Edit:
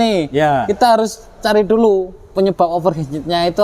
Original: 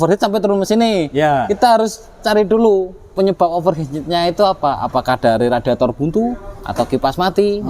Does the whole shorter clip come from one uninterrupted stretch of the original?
yes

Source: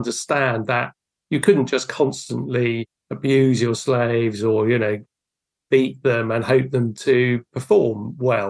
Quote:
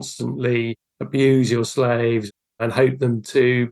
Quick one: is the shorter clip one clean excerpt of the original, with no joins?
no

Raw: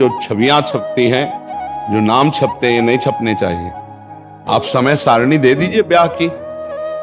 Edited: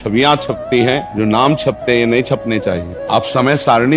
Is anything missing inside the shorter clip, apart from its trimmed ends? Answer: yes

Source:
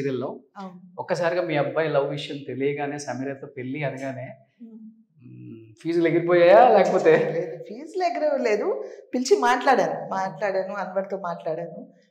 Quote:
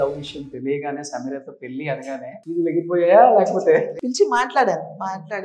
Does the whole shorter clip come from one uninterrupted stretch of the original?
no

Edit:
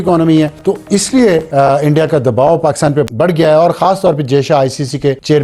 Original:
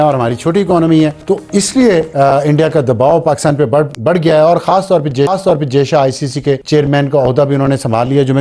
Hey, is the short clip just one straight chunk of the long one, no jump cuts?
no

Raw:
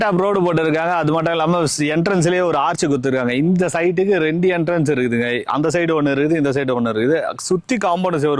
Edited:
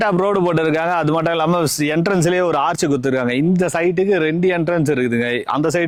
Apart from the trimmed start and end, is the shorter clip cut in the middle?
no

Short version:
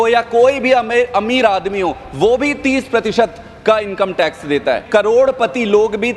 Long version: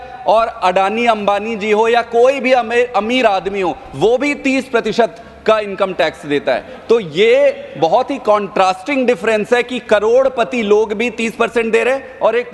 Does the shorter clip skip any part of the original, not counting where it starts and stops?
yes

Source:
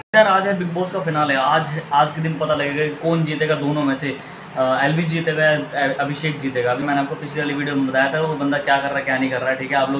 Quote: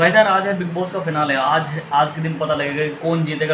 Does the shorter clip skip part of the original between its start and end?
no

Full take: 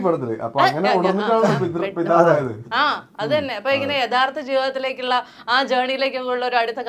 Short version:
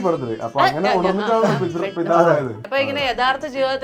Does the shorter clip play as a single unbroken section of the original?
no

